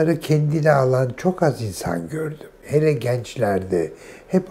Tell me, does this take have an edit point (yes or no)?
no